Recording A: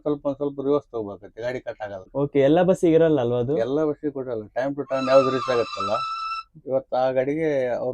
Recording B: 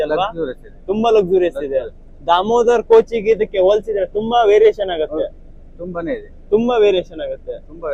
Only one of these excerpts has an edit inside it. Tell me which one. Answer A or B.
A